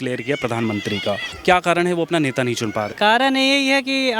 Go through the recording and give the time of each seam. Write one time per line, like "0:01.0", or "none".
0:02.9